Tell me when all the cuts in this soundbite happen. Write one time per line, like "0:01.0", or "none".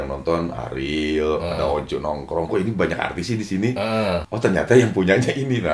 0:04.3

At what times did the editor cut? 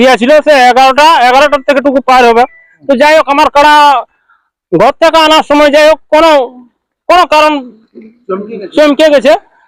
none

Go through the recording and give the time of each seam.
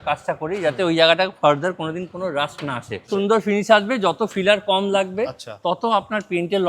0:03.1

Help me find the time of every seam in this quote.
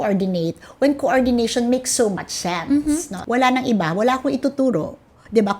0:03.1

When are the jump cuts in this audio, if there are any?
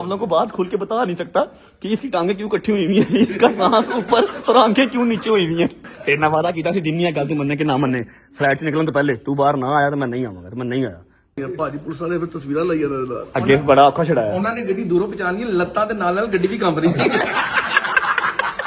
0:05.9
0:11.4
0:17.3

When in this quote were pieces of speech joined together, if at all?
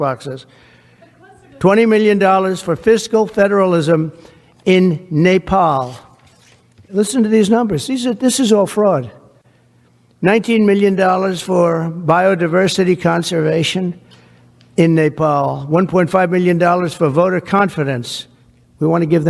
none

